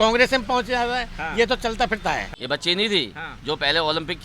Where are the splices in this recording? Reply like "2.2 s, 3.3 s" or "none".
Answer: 2.3 s